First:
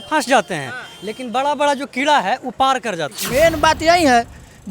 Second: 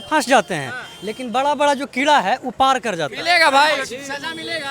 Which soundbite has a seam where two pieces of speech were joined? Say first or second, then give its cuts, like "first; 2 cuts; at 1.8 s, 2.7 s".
first; 1 cut; at 3.1 s